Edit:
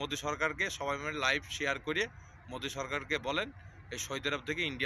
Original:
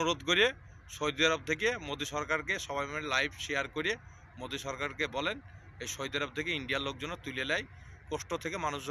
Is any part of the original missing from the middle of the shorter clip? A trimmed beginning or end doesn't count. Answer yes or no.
no